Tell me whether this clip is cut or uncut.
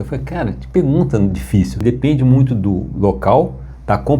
cut